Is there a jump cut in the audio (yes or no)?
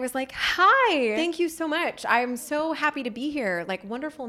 yes